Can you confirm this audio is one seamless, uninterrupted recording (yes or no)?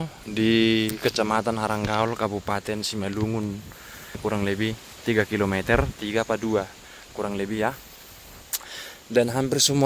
no